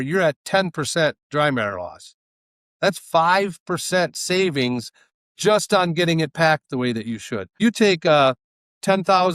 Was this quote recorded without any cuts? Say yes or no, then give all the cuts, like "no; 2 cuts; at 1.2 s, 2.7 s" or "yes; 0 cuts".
no; 1 cut; at 7.6 s